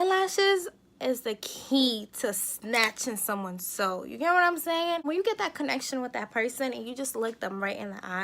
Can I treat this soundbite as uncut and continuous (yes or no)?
no